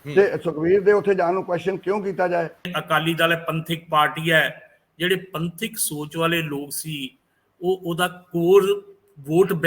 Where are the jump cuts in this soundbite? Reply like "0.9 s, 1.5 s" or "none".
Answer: 2.8 s